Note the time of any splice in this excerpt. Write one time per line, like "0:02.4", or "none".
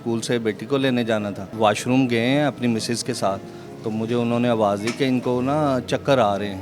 0:01.5